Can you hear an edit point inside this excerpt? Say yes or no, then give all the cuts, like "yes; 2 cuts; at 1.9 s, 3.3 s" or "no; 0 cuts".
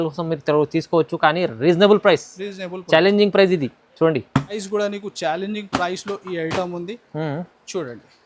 yes; 1 cut; at 4.6 s